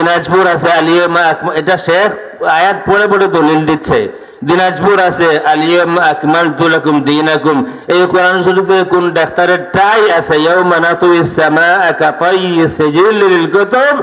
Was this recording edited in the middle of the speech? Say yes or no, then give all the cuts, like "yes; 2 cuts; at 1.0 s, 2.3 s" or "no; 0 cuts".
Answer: no; 0 cuts